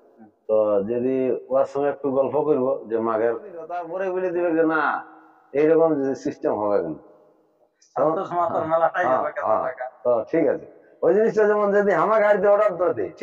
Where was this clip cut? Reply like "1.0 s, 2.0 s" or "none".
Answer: 3.9 s